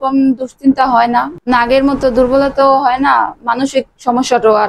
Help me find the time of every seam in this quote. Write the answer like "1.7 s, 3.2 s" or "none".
1.3 s